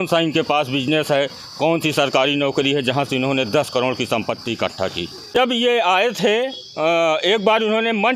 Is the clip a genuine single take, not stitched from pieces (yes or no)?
no